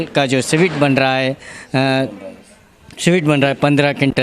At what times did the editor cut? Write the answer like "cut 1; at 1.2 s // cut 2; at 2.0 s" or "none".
none